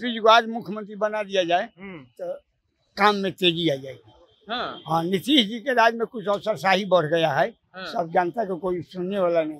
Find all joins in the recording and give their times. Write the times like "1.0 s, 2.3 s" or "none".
none

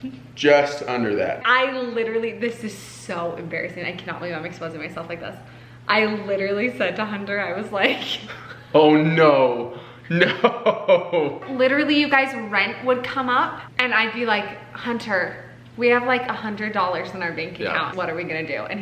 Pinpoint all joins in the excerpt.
1.4 s, 11.4 s, 17.9 s

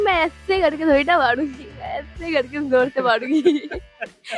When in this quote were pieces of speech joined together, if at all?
none

